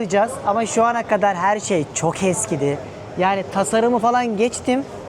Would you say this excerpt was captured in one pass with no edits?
yes; 0 cuts

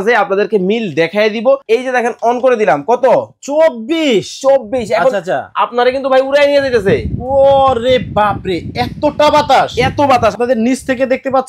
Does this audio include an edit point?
yes; 2 cuts; at 1.6 s, 10.3 s

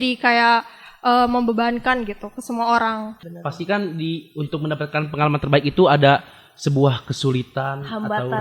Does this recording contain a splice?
yes; 1 cut; at 3.2 s

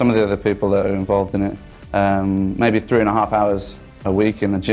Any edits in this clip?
no; 0 cuts

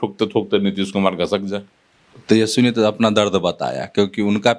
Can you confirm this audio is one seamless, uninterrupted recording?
no; 1 cut; at 2.1 s

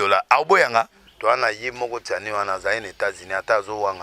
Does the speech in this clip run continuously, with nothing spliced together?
no; 1 cut; at 1.0 s

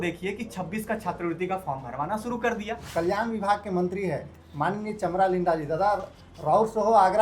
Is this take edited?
yes; 1 cut; at 2.8 s

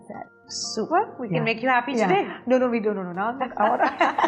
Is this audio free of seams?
yes; 0 cuts

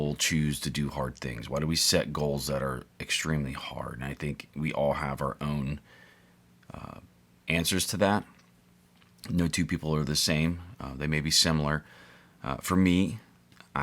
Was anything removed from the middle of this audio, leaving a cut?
no; 0 cuts

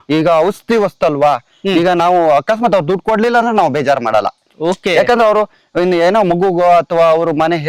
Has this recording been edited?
no; 0 cuts

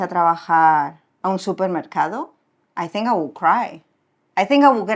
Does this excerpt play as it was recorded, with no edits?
yes; 0 cuts

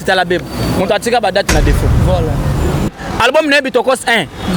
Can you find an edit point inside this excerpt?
yes; 1 cut; at 2.9 s

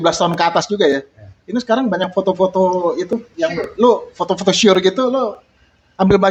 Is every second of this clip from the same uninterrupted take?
yes; 0 cuts

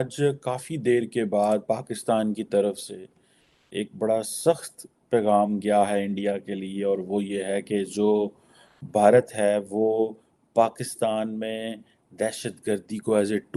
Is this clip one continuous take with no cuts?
yes; 0 cuts

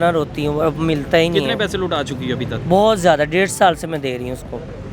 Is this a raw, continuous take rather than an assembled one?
yes; 0 cuts

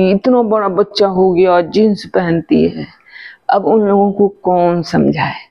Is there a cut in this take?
no; 0 cuts

